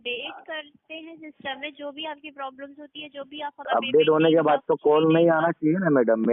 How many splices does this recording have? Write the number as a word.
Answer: one